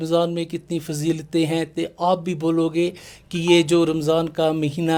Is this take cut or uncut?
uncut